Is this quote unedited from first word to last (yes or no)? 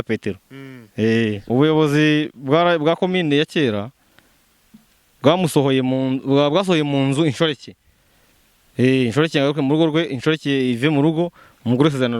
no